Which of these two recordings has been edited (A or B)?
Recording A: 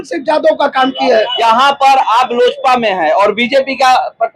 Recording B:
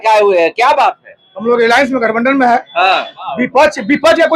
A